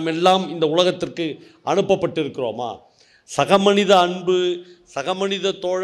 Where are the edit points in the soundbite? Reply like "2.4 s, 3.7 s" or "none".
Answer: none